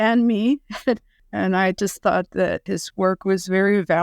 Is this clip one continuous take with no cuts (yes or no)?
no